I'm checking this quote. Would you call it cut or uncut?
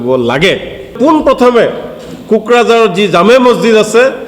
cut